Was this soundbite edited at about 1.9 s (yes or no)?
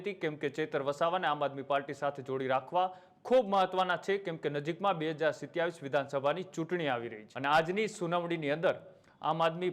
no